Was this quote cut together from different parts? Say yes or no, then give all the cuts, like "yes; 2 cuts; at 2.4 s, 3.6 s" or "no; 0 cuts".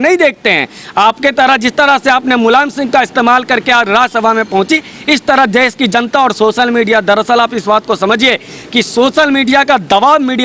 no; 0 cuts